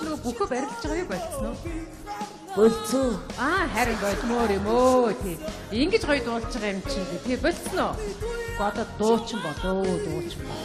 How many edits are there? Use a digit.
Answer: 0